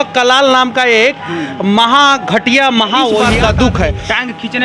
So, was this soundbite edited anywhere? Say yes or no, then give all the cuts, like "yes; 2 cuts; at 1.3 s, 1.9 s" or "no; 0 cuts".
yes; 1 cut; at 3.3 s